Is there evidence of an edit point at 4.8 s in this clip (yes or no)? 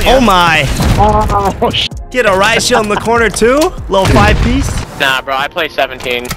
yes